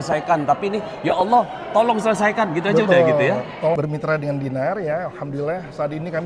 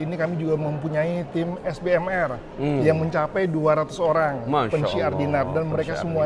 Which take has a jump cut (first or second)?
first